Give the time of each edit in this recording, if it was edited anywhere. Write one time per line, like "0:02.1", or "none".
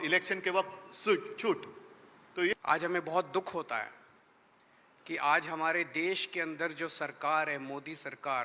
0:02.5

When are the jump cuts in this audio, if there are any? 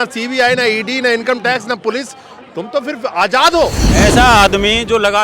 0:03.8

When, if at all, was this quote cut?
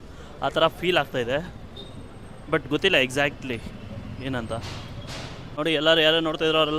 0:05.6

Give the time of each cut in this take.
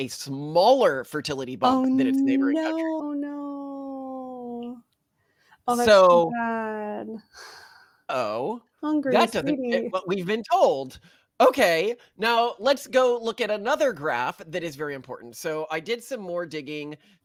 none

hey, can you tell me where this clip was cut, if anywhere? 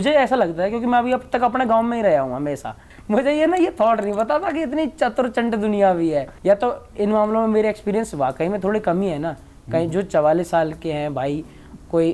0:02.8
0:06.3

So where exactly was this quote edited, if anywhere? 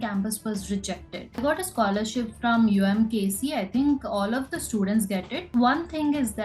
0:01.4
0:05.4

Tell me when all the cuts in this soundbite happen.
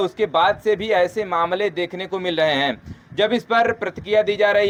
none

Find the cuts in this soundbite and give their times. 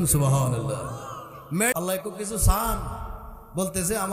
0:01.7

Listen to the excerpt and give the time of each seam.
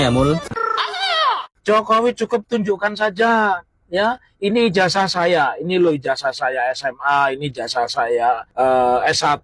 0:01.5
0:08.5

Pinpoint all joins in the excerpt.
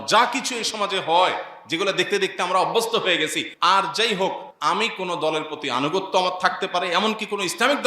0:03.4
0:04.5

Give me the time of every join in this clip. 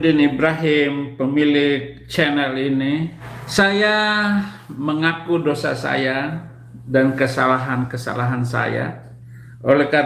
0:03.2

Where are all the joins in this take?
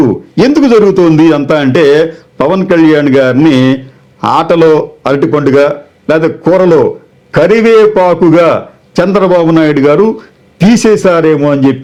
none

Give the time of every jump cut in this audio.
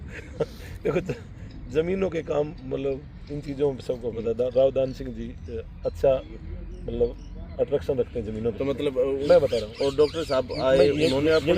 0:09.2

